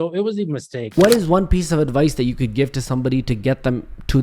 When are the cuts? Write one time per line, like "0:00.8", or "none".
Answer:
0:00.9